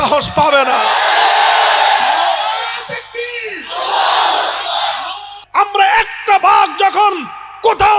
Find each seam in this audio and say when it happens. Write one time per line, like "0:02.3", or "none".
0:05.4